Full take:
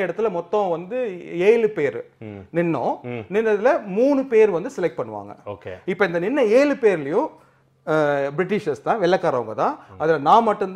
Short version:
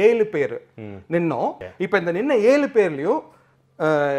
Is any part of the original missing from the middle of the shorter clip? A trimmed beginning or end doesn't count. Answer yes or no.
yes